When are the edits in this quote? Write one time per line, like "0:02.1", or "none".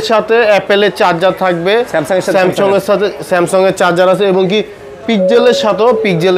none